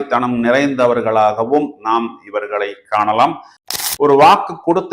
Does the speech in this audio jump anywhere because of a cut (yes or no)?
yes